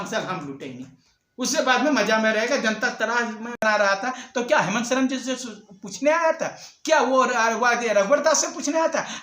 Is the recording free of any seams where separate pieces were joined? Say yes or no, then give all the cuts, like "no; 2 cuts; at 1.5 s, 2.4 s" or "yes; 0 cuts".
no; 1 cut; at 3.6 s